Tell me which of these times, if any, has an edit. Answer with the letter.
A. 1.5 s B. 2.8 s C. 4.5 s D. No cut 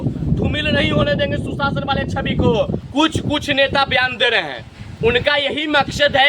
B